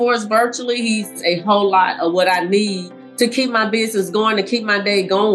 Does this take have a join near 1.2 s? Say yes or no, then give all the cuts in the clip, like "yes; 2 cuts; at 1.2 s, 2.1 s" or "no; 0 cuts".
yes; 1 cut; at 1.2 s